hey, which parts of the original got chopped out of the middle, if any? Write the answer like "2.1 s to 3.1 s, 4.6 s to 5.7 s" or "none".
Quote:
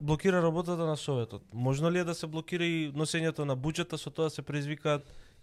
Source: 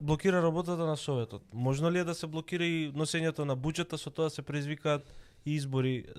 none